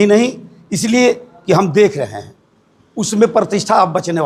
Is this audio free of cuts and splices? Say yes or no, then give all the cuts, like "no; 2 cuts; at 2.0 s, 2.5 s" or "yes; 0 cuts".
yes; 0 cuts